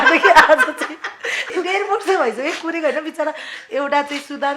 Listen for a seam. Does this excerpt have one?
yes; 1 cut; at 1.5 s

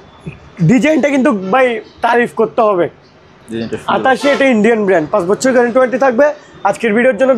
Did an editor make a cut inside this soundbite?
no; 0 cuts

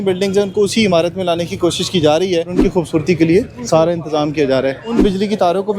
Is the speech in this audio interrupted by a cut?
yes; 2 cuts; at 2.6 s, 5.0 s

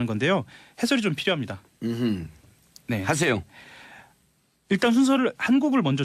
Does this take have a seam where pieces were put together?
no; 0 cuts

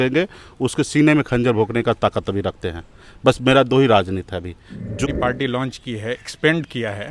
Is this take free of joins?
no; 1 cut; at 5.1 s

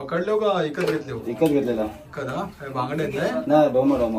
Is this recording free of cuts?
yes; 0 cuts

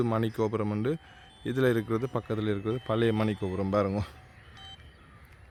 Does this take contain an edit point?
no; 0 cuts

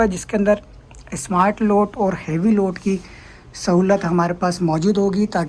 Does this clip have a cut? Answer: no; 0 cuts

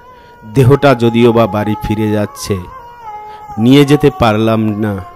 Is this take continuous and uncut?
yes; 0 cuts

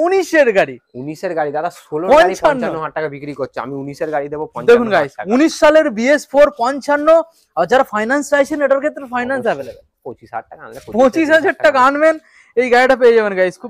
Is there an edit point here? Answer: no; 0 cuts

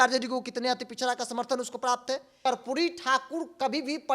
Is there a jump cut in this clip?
yes; 1 cut; at 2.3 s

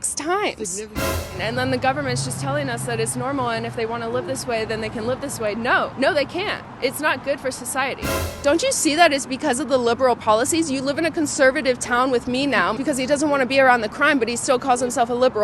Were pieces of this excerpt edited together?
yes; 3 cuts; at 1.1 s, 8.1 s, 12.7 s

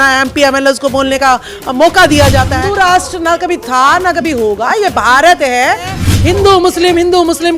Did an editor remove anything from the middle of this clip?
yes; 2 cuts; at 2.6 s, 6.1 s

